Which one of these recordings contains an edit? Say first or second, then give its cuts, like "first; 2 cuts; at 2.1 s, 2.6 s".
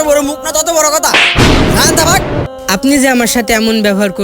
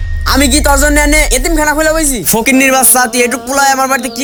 first; 1 cut; at 2.5 s